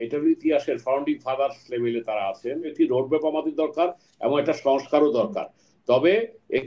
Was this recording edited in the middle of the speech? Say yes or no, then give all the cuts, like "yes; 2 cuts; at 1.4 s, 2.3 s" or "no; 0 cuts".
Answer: yes; 1 cut; at 2.7 s